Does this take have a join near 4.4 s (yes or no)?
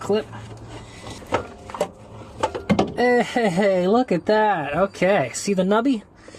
no